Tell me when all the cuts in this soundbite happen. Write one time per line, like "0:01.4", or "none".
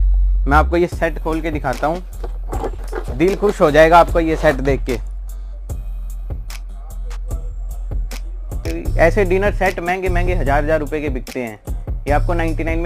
0:02.8
0:08.7